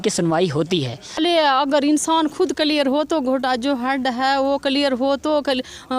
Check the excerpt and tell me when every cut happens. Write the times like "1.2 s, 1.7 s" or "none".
1.2 s